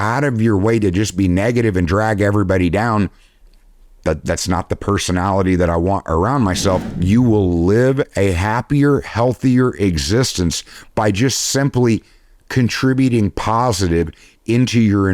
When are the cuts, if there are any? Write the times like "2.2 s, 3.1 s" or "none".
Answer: 6.9 s